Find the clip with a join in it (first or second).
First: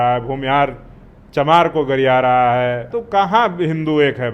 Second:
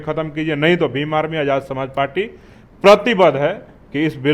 first